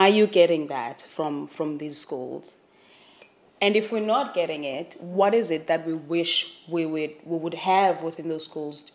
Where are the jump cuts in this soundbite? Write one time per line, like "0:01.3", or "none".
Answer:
0:03.9